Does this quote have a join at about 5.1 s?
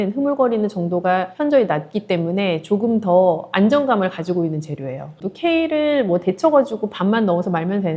yes; 1 cut; at 5.1 s

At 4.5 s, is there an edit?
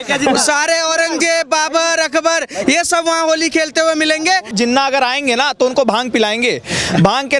yes; 1 cut; at 4.5 s

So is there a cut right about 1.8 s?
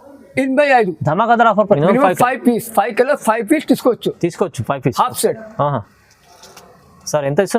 yes; 1 cut; at 1.8 s

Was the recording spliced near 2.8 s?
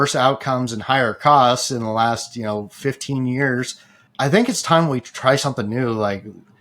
no; 1 cut; at 4.0 s

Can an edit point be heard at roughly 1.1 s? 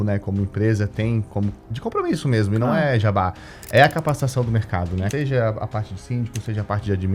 no; 1 cut; at 5.1 s

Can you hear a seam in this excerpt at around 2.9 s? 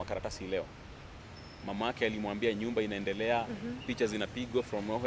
no; 0 cuts

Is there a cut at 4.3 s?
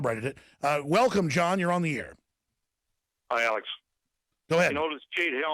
no; 1 cut; at 2.2 s

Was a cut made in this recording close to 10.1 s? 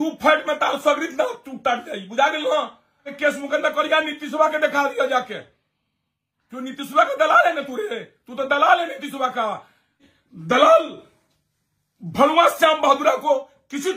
yes; 2 cuts; at 3.1 s, 10.1 s

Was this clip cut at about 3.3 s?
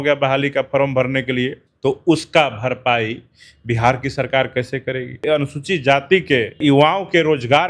no; 3 cuts; at 1.6 s, 5.2 s, 6.6 s

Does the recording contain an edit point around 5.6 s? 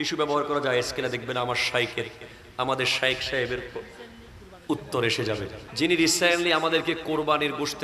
yes; 1 cut; at 5.6 s

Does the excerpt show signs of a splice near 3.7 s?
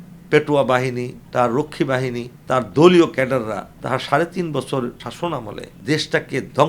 yes; 4 cuts; at 1.2 s, 2.3 s, 3.7 s, 5.3 s

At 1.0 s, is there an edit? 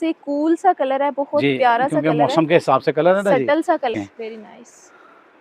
no; 1 cut; at 3.9 s

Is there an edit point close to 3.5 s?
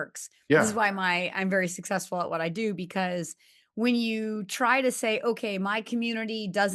no; 0 cuts

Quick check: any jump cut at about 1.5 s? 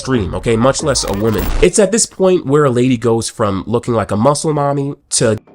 yes; 1 cut; at 1.5 s

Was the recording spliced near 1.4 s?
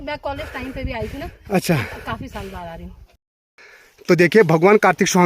no; 1 cut; at 3.0 s

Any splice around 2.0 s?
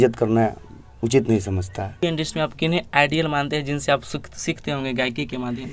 yes; 1 cut; at 2.0 s

